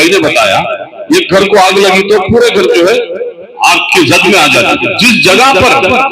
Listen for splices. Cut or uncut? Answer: cut